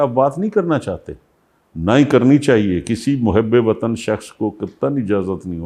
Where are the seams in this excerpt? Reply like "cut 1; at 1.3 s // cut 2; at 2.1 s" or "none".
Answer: none

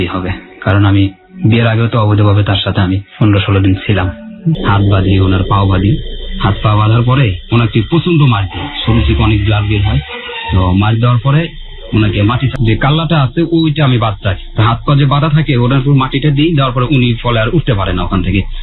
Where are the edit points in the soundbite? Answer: cut 1; at 4.5 s

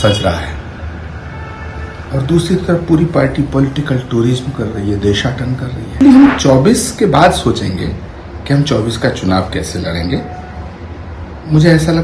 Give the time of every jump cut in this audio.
cut 1; at 6.0 s

